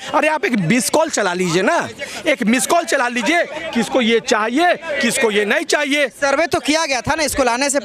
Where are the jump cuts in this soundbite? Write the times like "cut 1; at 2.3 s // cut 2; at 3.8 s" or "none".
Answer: none